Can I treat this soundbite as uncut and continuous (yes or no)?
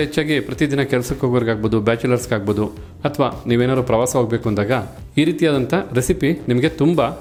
yes